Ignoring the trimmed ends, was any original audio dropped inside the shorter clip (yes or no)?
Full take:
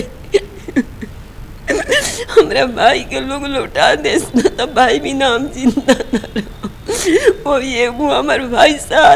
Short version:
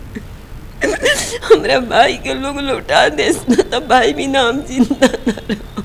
no